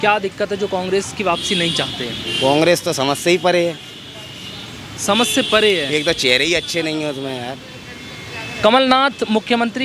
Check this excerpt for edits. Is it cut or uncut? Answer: uncut